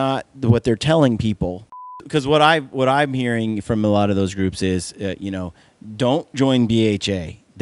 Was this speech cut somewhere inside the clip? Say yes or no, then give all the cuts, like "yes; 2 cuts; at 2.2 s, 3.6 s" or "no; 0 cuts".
yes; 1 cut; at 2.0 s